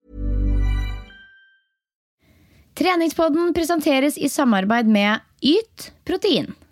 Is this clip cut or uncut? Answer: cut